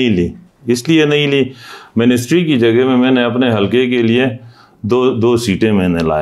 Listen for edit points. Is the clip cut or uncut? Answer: uncut